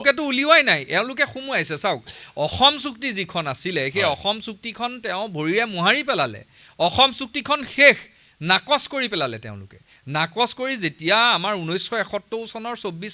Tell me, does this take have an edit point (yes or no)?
no